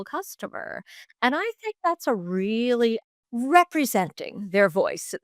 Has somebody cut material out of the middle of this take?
yes; 1 cut; at 3.0 s

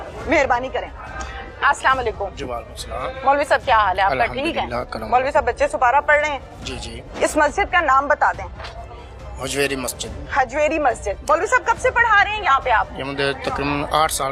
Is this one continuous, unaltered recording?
yes; 0 cuts

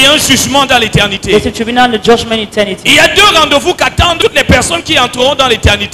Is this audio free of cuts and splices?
yes; 0 cuts

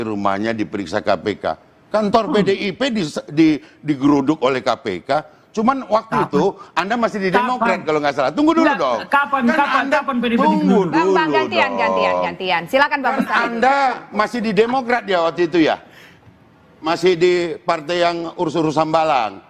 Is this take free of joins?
yes; 0 cuts

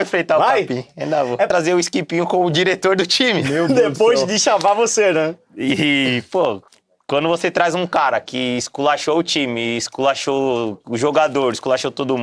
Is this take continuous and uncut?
no; 1 cut; at 1.5 s

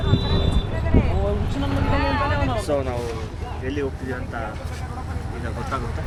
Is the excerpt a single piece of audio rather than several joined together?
yes; 0 cuts

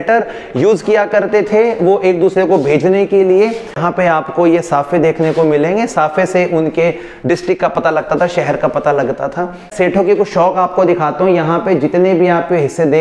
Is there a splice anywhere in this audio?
yes; 2 cuts; at 3.8 s, 9.7 s

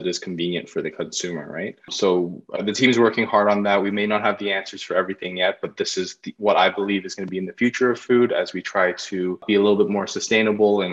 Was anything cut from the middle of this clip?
yes; 2 cuts; at 1.9 s, 9.4 s

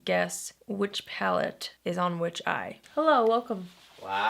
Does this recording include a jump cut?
yes; 1 cut; at 2.8 s

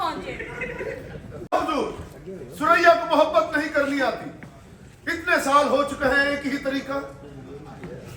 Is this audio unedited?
no; 1 cut; at 1.5 s

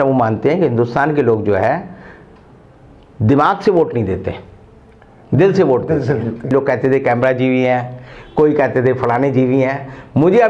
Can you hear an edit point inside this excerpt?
yes; 1 cut; at 6.5 s

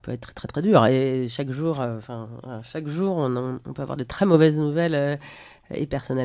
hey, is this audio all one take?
yes; 0 cuts

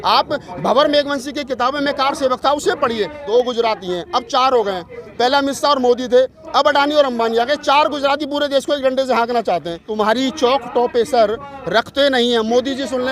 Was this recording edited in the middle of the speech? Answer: yes; 2 cuts; at 3.2 s, 9.9 s

